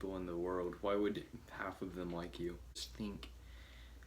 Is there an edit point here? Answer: yes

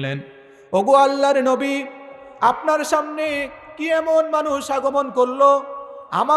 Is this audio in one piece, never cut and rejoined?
yes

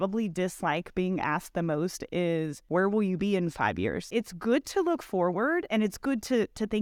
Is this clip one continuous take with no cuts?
no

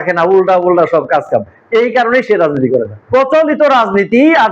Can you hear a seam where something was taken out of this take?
yes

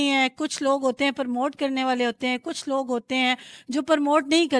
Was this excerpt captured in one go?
yes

